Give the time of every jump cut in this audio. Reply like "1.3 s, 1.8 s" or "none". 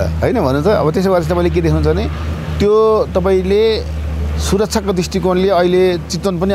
none